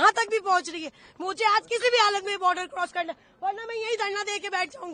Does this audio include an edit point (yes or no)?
no